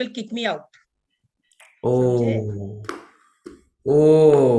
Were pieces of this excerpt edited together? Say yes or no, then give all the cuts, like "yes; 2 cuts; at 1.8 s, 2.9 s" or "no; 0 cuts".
no; 0 cuts